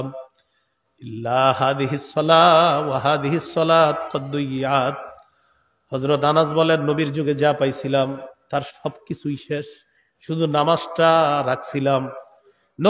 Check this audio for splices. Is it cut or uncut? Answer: uncut